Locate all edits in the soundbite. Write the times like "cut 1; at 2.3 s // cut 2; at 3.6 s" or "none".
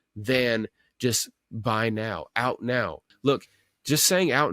cut 1; at 3.1 s

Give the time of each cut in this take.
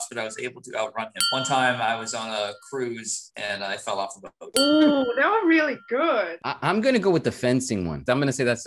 cut 1; at 1.2 s

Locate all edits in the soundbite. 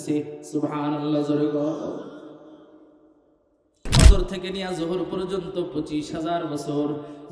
cut 1; at 3.9 s

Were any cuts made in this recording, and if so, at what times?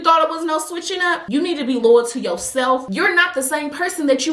cut 1; at 1.2 s // cut 2; at 2.8 s

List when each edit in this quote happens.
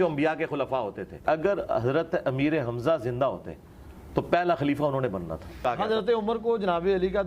cut 1; at 1.2 s // cut 2; at 5.6 s

